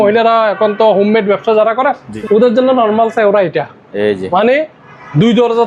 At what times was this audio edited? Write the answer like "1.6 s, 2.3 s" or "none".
2.1 s